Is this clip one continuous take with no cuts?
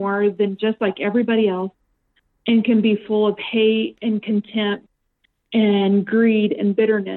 yes; 0 cuts

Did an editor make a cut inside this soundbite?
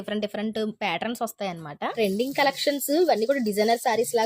yes; 1 cut; at 1.9 s

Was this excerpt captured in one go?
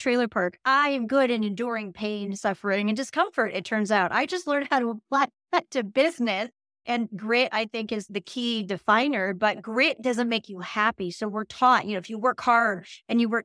no; 2 cuts; at 6.8 s, 8.1 s

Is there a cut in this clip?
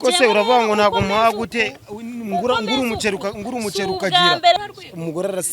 yes; 1 cut; at 4.6 s

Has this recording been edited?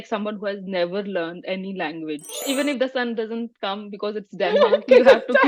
yes; 1 cut; at 2.4 s

